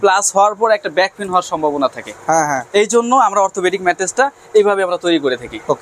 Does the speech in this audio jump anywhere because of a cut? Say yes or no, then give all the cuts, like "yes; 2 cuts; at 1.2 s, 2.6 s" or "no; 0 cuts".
no; 0 cuts